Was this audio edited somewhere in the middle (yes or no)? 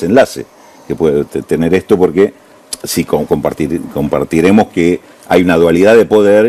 no